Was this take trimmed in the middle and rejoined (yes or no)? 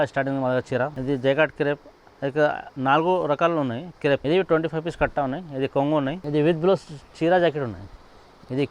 yes